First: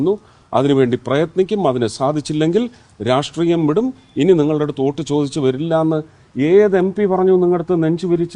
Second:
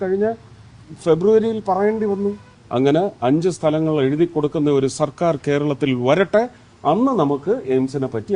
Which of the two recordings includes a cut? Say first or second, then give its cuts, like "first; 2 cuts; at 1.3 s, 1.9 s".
second; 1 cut; at 2.5 s